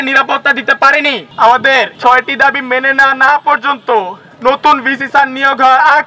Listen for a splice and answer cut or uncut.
cut